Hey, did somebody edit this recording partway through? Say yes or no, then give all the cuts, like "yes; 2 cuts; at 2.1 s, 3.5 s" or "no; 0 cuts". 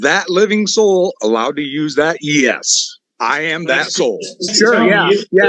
yes; 1 cut; at 4.5 s